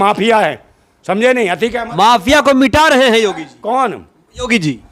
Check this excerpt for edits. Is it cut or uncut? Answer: uncut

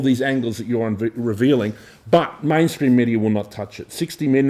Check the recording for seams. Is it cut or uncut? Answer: uncut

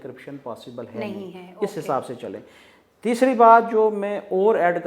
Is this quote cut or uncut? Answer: uncut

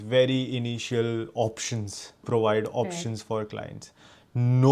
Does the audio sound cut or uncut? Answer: cut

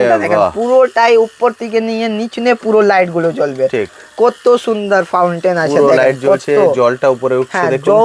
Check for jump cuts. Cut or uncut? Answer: uncut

